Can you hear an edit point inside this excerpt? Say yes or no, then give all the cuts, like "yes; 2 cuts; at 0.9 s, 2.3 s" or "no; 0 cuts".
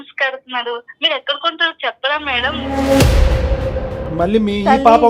no; 0 cuts